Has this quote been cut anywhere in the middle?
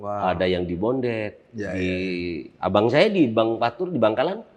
no; 0 cuts

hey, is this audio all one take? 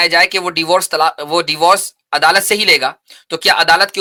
yes; 0 cuts

